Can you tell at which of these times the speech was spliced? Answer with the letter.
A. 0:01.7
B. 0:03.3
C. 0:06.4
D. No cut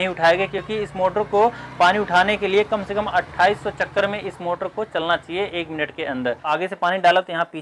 C